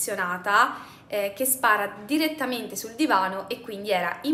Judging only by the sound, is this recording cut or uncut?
uncut